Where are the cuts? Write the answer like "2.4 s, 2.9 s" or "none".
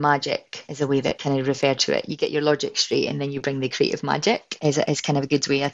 1.0 s, 4.5 s